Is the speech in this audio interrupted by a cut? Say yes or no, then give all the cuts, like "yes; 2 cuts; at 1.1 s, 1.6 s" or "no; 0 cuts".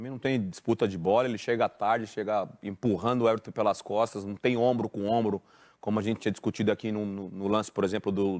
no; 0 cuts